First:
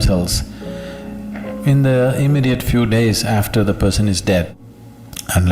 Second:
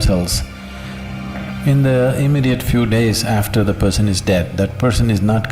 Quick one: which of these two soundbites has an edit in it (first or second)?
first